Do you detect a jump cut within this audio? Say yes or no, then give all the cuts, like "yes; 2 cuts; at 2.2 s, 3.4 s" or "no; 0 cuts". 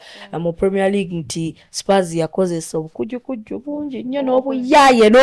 no; 0 cuts